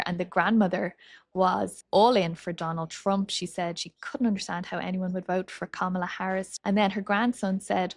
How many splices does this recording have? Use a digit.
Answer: 2